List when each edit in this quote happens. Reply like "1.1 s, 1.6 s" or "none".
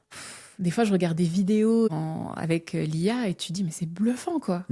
1.9 s